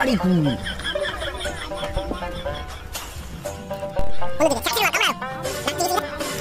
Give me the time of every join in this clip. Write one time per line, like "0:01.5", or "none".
none